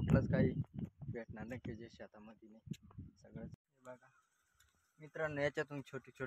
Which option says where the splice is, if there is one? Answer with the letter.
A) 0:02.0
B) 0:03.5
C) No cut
B